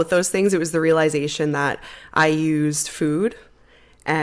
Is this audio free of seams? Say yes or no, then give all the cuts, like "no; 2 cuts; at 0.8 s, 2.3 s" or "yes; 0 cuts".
yes; 0 cuts